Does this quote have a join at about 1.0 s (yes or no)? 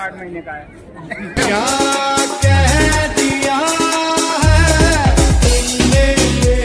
no